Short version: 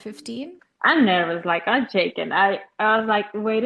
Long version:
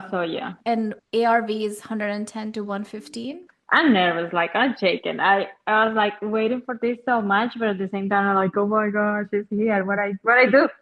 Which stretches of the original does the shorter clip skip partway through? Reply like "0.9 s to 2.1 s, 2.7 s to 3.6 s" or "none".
none